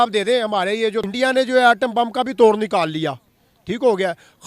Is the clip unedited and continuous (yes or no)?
no